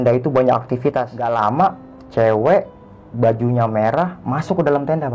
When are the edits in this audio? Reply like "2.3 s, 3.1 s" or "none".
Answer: 1.2 s